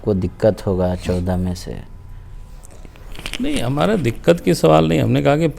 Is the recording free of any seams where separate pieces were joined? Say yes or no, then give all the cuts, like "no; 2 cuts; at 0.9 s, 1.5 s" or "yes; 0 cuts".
yes; 0 cuts